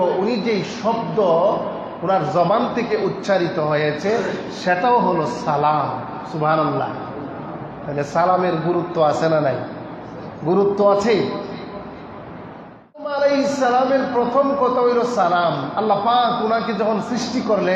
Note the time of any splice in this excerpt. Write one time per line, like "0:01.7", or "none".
0:13.1